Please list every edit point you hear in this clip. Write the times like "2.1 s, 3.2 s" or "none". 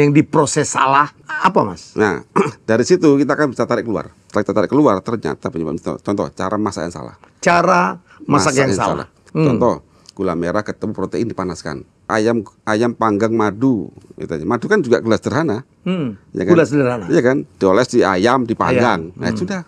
1.2 s, 4.2 s, 9.2 s, 12.1 s